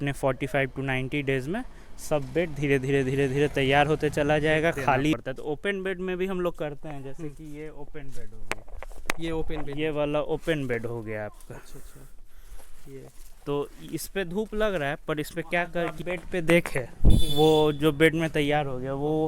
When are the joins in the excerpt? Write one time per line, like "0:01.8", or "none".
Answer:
0:05.1
0:15.9